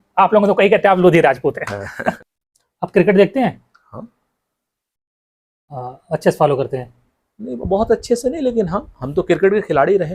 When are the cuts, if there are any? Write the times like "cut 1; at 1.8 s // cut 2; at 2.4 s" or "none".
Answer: cut 1; at 2.2 s